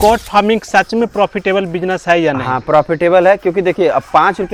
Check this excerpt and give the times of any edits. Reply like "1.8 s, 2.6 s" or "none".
none